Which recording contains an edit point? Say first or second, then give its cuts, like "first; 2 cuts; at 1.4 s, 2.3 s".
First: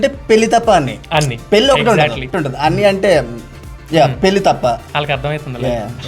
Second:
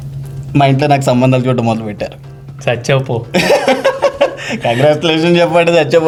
first; 1 cut; at 2.3 s